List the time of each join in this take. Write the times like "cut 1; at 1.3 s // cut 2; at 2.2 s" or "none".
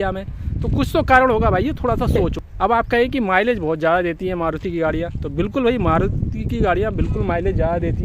none

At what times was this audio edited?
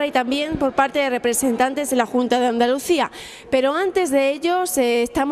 cut 1; at 3.7 s

